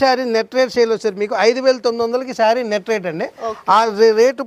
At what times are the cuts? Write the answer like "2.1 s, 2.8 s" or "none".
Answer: none